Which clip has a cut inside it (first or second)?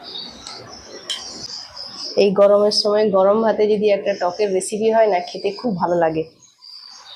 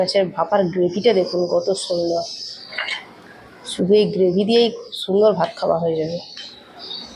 first